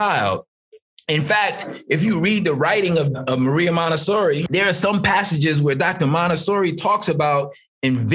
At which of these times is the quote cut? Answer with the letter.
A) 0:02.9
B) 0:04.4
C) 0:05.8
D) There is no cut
B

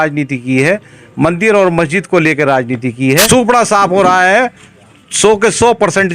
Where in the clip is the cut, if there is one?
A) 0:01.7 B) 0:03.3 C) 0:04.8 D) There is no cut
B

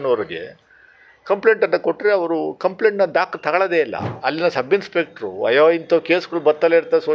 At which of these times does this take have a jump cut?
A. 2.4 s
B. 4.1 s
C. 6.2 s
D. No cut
B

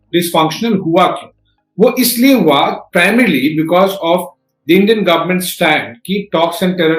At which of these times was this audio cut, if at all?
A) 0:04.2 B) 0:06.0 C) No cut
C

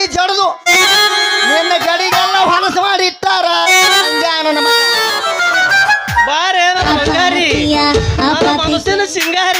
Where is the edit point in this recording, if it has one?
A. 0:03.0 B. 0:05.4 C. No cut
B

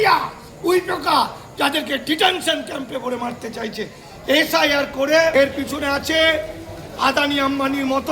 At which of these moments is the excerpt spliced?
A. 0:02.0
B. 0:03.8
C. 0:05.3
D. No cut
C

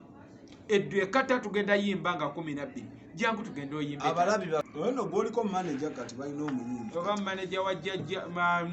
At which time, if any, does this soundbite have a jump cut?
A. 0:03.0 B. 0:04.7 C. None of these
B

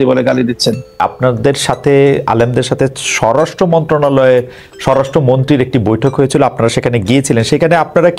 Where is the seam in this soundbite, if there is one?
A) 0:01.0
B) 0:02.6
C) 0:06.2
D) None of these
A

